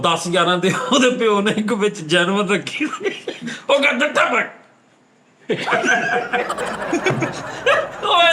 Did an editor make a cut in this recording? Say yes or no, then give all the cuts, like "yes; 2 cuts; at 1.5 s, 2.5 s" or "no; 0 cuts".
no; 0 cuts